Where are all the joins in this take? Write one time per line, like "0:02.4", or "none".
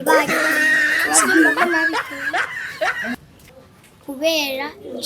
0:03.3